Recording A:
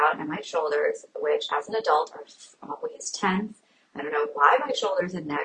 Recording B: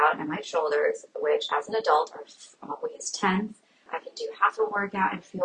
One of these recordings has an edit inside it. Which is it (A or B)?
B